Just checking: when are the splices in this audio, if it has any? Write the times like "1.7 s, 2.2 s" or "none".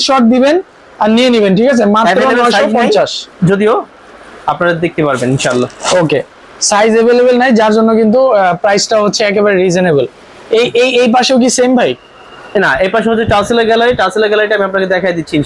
none